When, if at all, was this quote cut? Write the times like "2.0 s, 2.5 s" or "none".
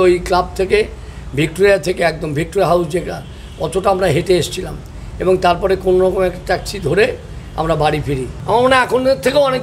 8.3 s